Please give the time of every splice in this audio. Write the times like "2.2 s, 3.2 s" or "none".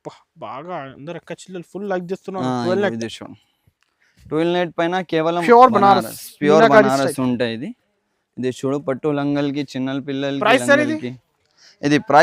5.4 s

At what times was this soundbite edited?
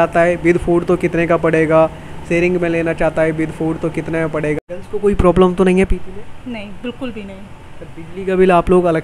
4.7 s

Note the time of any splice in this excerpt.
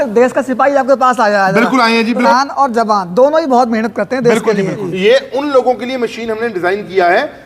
2.3 s, 4.9 s

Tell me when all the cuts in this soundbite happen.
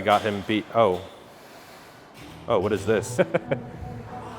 3.1 s

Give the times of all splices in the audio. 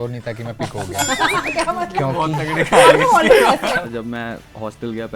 3.9 s

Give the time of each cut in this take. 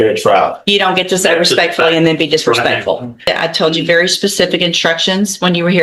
3.3 s

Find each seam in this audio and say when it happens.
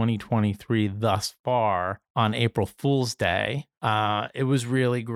2.0 s, 3.7 s

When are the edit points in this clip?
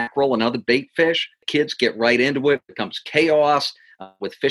1.4 s

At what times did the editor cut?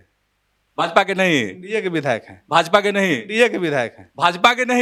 none

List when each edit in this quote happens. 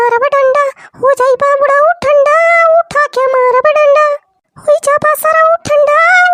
none

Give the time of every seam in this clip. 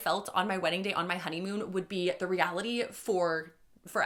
none

